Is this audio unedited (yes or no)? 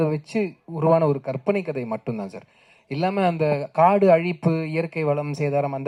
yes